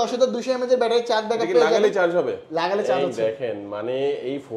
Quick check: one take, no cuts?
yes; 0 cuts

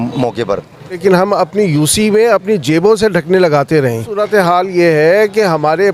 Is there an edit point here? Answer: yes; 2 cuts; at 1.0 s, 4.2 s

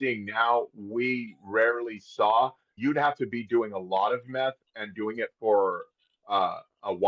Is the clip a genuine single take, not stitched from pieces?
no; 1 cut; at 2.7 s

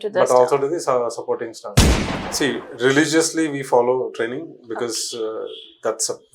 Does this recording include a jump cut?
yes; 1 cut; at 1.8 s

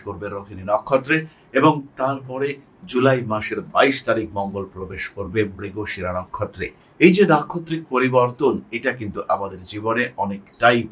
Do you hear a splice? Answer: no; 0 cuts

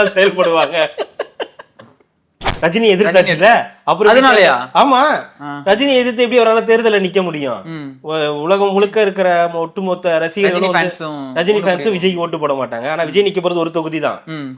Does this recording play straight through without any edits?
no; 1 cut; at 2.4 s

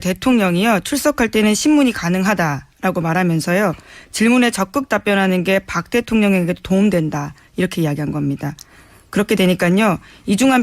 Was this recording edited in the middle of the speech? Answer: yes; 1 cut; at 5.3 s

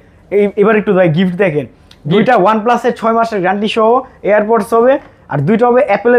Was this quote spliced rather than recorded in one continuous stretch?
no; 0 cuts

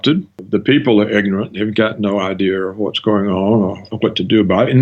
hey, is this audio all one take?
no; 1 cut; at 3.9 s

